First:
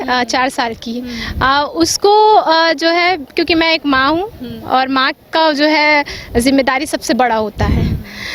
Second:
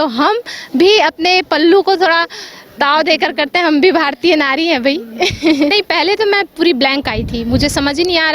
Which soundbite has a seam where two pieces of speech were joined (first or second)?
second